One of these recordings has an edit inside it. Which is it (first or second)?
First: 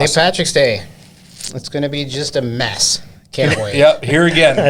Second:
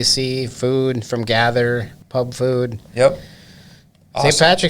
second